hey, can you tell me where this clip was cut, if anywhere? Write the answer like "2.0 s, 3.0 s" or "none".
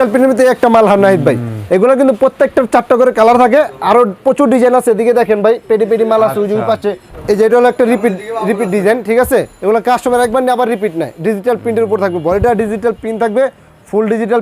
7.1 s, 9.5 s